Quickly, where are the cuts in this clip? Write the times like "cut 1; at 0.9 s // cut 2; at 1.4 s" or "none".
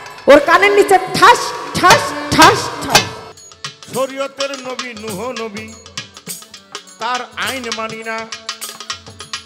cut 1; at 3.2 s